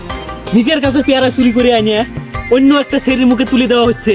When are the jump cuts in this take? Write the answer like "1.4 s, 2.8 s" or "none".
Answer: none